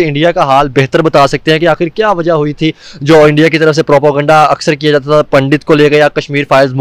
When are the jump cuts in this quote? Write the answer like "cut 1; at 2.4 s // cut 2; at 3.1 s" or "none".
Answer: none

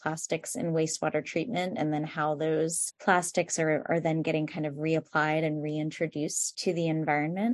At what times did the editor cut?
cut 1; at 2.9 s // cut 2; at 6.5 s

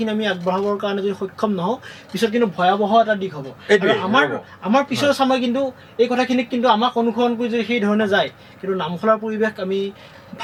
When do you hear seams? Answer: none

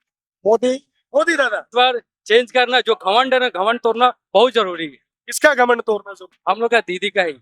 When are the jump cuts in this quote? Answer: cut 1; at 1.7 s

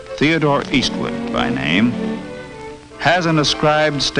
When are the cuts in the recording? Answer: cut 1; at 2.5 s

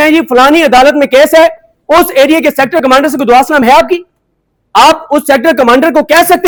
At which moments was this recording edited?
none

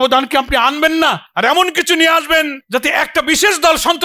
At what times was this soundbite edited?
cut 1; at 1.3 s // cut 2; at 2.6 s

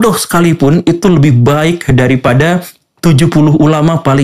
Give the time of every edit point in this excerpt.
none

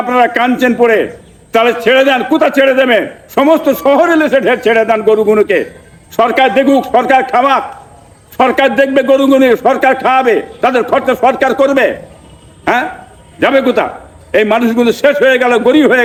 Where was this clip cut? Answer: none

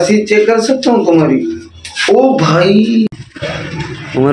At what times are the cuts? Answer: cut 1; at 3.1 s

